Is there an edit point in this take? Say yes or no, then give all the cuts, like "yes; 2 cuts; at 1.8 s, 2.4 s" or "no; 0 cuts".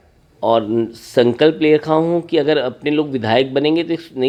no; 0 cuts